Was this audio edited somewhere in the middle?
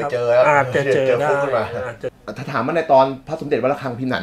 yes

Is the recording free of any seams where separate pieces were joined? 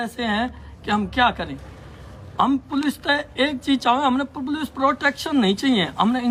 yes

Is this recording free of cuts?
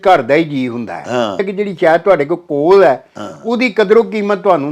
no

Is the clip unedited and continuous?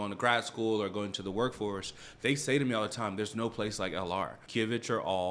no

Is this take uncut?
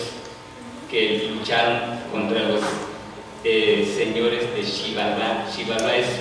no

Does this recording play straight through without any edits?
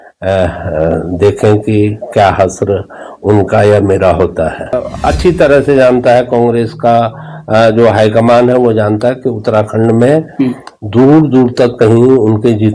no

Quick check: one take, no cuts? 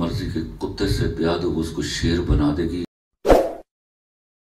no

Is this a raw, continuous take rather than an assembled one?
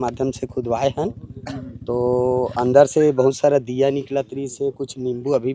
yes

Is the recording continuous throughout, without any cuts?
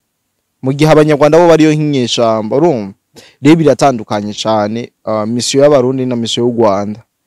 yes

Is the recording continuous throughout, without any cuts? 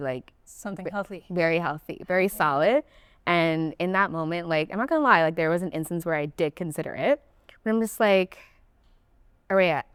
yes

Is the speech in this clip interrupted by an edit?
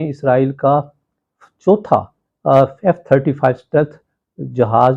no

